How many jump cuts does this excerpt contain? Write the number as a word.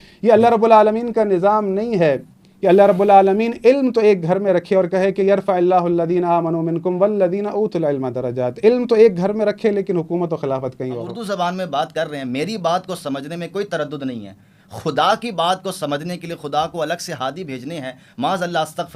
one